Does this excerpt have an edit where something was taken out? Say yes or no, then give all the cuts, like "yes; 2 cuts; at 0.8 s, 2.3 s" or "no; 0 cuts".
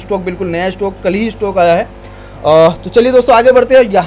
no; 0 cuts